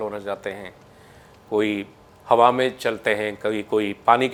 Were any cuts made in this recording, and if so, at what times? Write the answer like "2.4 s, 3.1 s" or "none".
none